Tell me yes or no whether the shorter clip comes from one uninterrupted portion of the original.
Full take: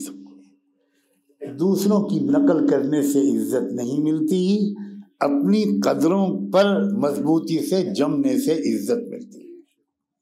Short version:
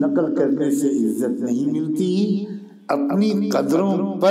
yes